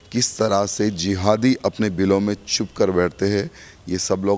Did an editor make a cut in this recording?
no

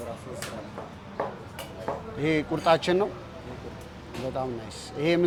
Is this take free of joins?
yes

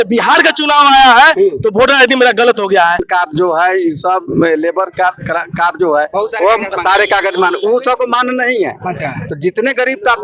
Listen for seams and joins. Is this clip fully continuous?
no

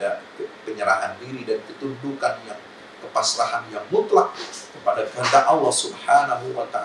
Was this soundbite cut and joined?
no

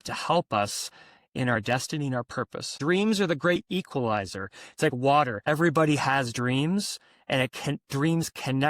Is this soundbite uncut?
no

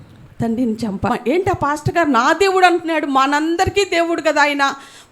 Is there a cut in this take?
yes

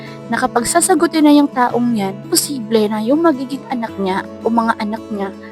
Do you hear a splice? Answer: yes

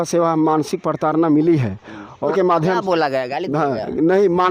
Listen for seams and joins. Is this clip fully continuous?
no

